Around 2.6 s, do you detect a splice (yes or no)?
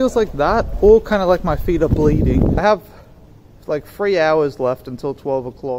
yes